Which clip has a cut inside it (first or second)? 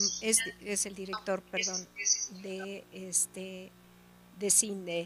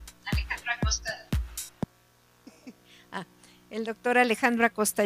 second